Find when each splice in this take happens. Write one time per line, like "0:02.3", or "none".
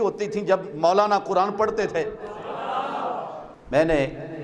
0:03.5